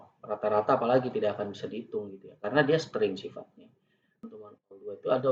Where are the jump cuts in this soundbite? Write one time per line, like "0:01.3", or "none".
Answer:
0:04.2